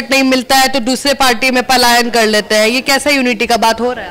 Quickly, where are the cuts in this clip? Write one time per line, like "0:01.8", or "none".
none